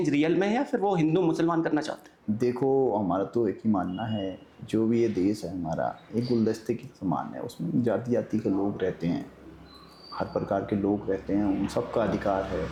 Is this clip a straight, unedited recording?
yes; 0 cuts

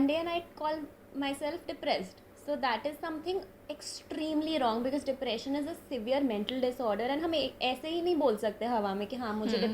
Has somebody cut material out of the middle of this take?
no; 0 cuts

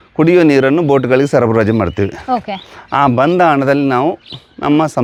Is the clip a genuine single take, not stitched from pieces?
yes; 0 cuts

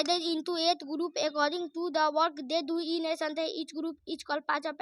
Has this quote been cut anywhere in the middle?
no; 0 cuts

